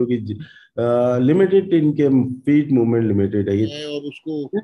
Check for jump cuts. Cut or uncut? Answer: cut